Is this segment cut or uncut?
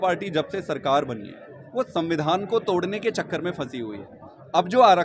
uncut